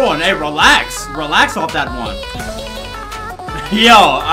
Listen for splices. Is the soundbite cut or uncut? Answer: cut